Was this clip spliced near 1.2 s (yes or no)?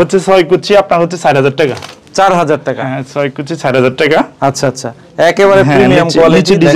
no